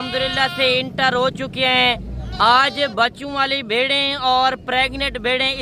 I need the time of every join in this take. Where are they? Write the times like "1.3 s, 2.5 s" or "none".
none